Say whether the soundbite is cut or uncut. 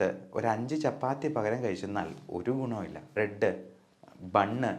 cut